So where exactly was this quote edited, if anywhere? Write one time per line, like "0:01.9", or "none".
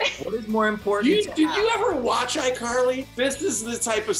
0:03.1